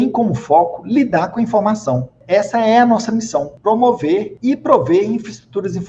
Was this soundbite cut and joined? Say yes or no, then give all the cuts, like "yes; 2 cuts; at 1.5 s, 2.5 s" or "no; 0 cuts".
yes; 3 cuts; at 2.1 s, 3.5 s, 4.3 s